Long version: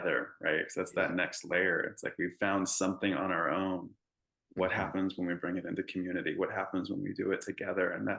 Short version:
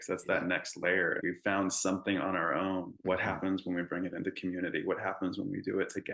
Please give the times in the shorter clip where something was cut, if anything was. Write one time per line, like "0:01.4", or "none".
0:01.2
0:02.9